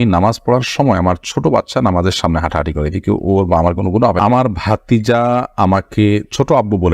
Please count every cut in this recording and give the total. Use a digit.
1